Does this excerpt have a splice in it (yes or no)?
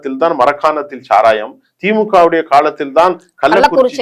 no